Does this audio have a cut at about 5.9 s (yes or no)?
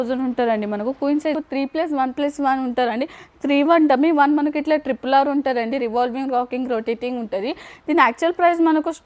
no